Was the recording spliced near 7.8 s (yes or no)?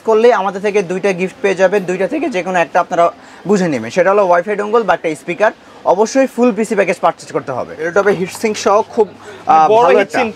yes